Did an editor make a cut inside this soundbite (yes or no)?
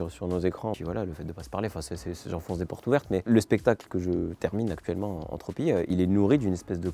yes